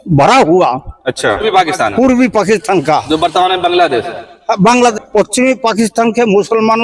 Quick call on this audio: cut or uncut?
cut